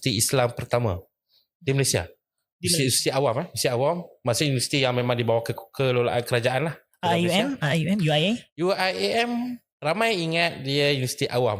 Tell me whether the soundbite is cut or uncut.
uncut